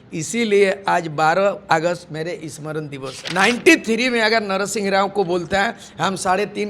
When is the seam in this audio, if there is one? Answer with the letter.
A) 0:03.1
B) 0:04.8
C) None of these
A